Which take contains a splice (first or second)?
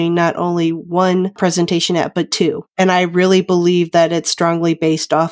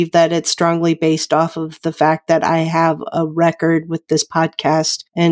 first